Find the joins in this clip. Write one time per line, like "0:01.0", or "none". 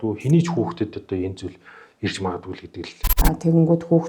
0:03.1